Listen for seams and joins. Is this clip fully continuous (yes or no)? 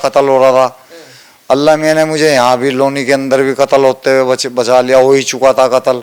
yes